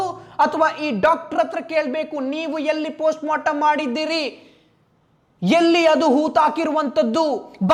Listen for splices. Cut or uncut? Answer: uncut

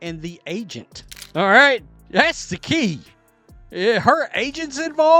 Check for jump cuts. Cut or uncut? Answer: cut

